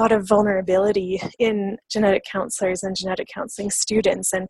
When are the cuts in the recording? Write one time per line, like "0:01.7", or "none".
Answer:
0:01.8

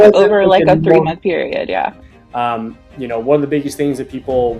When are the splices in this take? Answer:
0:02.0

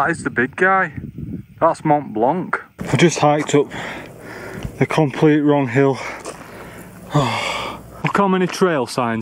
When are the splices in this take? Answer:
0:02.8
0:07.9

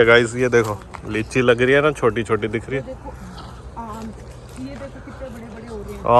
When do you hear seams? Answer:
none

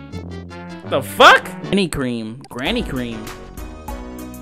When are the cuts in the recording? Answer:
0:01.7

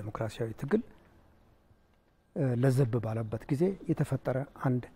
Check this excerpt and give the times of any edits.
none

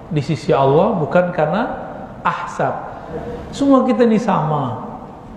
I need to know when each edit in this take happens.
0:03.1

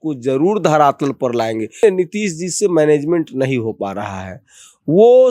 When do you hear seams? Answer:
0:01.8

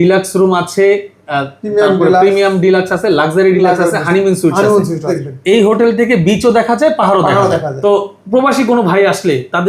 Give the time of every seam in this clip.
0:05.2
0:07.7

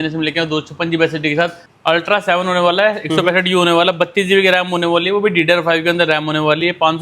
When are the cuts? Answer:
0:01.7

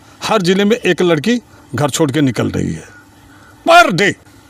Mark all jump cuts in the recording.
none

